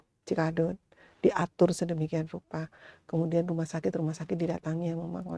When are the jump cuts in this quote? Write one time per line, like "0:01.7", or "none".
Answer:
none